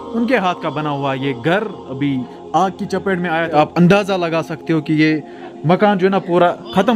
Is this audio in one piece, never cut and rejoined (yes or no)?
no